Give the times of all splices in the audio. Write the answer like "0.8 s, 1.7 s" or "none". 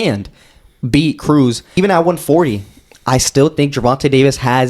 1.8 s